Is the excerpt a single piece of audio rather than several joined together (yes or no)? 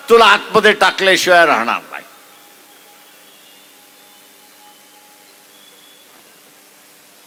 yes